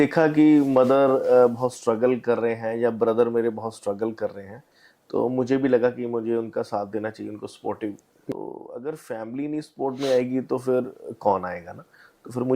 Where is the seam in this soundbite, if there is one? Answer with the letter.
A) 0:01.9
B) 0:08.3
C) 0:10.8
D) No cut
B